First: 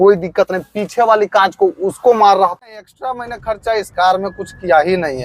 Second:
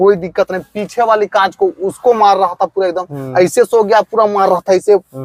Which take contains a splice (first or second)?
first